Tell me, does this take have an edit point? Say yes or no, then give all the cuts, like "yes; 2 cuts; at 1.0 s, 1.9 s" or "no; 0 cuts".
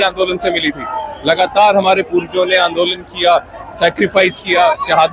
no; 0 cuts